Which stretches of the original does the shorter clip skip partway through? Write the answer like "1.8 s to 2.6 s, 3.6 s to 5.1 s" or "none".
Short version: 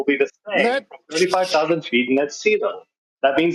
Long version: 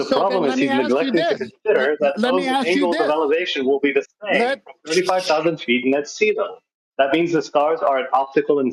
none